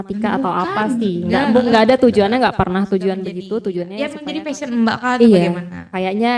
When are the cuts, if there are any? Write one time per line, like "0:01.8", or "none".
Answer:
0:03.9